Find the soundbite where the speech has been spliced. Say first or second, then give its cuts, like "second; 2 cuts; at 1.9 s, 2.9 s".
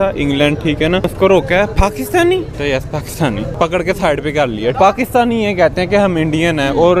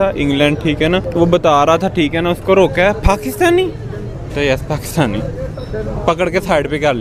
first; 4 cuts; at 1.1 s, 2.5 s, 3.5 s, 4.8 s